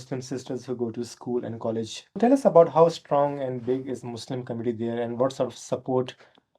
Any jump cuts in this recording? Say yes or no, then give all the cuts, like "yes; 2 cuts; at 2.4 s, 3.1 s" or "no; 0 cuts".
yes; 1 cut; at 2.2 s